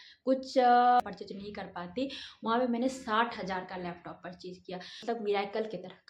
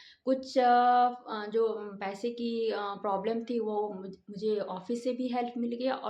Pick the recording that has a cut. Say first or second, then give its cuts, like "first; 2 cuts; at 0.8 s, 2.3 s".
first; 2 cuts; at 1.0 s, 5.0 s